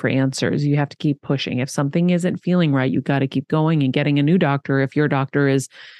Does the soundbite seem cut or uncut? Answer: uncut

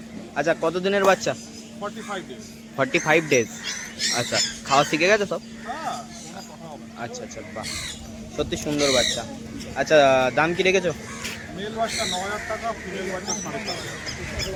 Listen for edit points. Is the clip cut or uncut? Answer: uncut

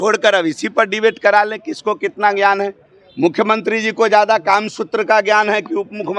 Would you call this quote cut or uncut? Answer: uncut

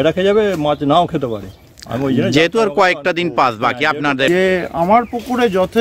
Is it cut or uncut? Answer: cut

